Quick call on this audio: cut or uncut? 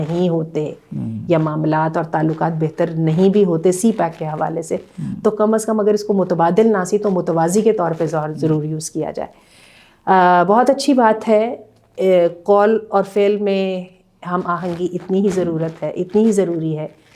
uncut